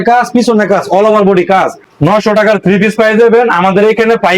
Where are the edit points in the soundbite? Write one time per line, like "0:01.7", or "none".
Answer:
0:01.8